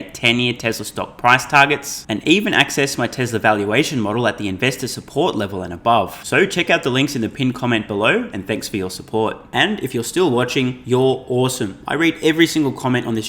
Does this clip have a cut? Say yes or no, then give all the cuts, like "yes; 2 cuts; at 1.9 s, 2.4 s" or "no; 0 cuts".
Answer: no; 0 cuts